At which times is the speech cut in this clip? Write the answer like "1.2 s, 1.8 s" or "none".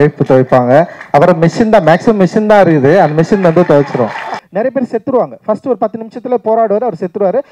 4.4 s